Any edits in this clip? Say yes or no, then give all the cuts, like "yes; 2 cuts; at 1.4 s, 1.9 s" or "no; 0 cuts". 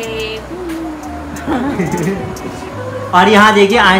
no; 0 cuts